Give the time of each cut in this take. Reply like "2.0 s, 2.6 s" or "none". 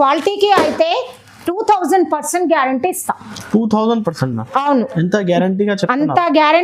none